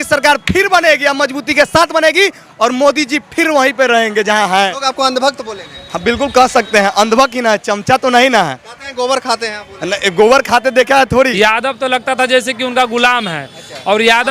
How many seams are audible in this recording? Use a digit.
2